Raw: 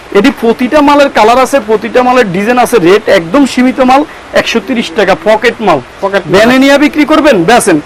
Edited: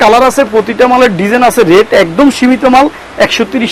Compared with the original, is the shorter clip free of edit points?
yes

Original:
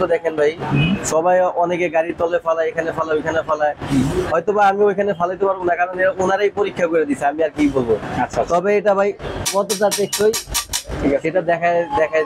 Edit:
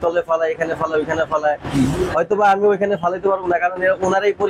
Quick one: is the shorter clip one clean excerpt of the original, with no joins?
yes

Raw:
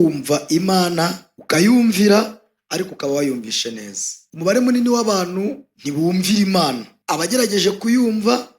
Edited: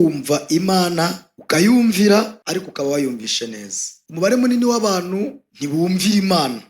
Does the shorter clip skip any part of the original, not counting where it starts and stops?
yes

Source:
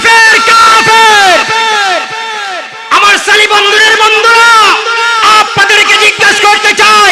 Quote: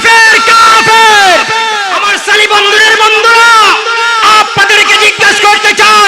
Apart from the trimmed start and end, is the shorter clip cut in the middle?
yes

